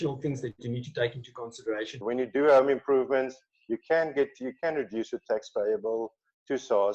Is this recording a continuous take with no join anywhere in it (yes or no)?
no